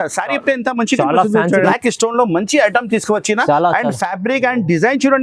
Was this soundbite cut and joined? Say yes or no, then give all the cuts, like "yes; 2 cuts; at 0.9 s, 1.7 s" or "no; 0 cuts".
yes; 1 cut; at 1.7 s